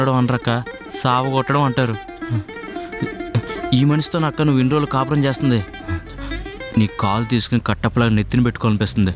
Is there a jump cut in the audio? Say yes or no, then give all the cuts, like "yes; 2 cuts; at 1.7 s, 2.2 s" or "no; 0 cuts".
no; 0 cuts